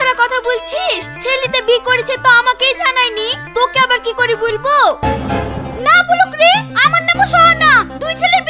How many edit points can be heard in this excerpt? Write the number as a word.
one